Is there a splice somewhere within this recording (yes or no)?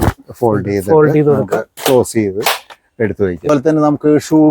yes